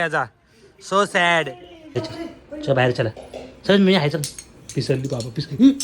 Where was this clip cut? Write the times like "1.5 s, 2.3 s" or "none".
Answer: 2.0 s